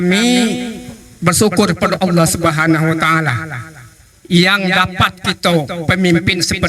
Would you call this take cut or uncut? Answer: uncut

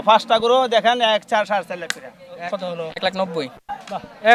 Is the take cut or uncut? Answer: cut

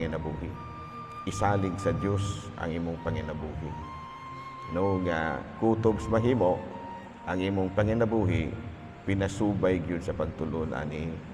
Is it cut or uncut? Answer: uncut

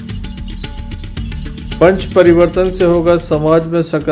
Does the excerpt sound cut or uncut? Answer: uncut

